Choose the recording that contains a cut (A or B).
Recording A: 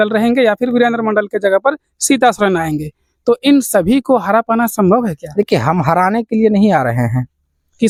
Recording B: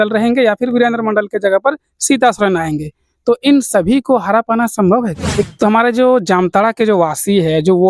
B